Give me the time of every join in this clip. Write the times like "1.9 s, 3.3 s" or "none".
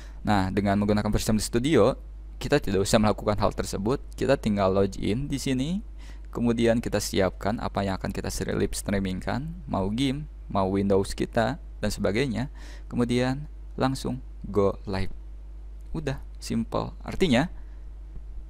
none